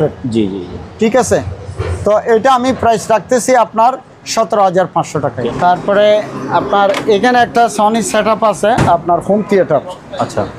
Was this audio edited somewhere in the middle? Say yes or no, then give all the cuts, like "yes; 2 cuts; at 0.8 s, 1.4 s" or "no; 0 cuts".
yes; 1 cut; at 5.4 s